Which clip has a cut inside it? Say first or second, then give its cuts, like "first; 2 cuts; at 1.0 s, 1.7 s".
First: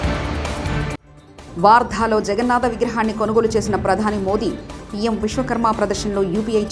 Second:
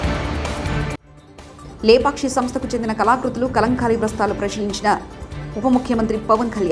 first; 1 cut; at 0.9 s